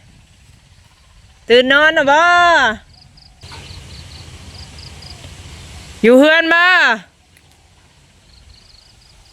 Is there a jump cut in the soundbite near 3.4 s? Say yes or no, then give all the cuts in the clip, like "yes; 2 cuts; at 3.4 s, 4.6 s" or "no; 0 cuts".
yes; 1 cut; at 3.4 s